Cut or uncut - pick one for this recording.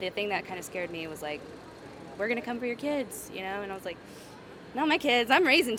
uncut